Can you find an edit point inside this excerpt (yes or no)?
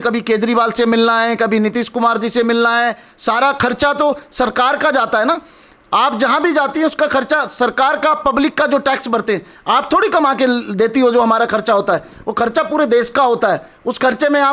no